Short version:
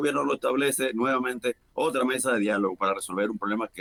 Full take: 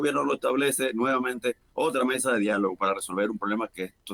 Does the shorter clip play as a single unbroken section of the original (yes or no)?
yes